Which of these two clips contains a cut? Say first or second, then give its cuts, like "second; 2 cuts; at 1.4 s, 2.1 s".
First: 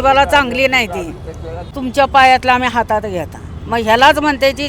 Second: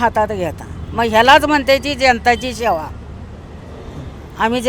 first; 1 cut; at 1.7 s